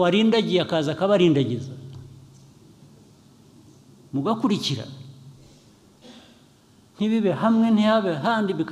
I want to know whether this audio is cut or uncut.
uncut